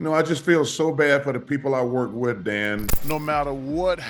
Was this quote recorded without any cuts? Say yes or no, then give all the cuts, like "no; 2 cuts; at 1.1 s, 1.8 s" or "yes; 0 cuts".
no; 1 cut; at 2.8 s